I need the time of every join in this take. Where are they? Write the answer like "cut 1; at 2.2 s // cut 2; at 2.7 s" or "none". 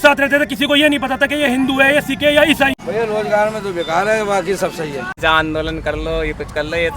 cut 1; at 5.1 s